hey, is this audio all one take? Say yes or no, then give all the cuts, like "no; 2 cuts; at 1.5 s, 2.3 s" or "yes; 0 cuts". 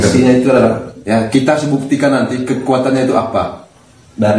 no; 1 cut; at 0.9 s